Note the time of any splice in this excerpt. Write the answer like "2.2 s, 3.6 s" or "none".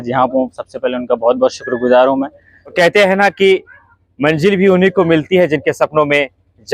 2.7 s